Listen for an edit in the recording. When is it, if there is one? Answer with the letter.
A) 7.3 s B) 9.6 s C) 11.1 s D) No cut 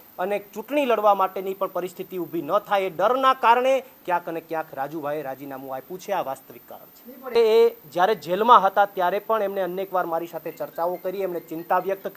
A